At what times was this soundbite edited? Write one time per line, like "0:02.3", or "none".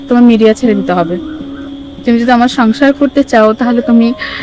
0:01.6